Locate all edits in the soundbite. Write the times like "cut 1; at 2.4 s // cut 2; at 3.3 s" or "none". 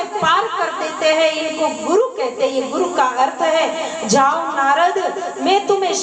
none